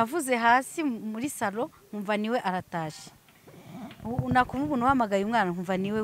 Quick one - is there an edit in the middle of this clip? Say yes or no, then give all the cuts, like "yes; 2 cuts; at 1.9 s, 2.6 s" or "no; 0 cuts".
no; 0 cuts